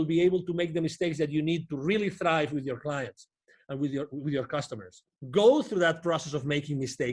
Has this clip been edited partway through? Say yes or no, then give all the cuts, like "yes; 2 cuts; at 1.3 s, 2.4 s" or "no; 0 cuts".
yes; 1 cut; at 5.1 s